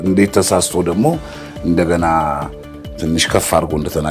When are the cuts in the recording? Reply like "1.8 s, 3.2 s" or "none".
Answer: none